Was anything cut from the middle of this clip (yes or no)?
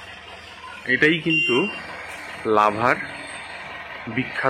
no